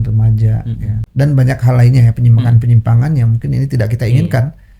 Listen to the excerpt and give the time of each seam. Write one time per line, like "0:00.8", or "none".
0:01.1